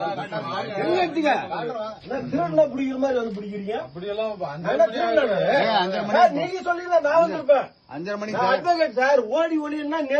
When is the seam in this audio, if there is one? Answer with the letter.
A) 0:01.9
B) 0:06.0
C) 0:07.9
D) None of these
A